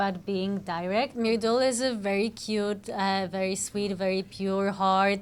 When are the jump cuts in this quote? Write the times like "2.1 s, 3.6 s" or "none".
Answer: 1.1 s